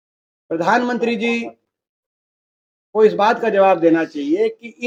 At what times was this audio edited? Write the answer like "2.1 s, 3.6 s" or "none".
none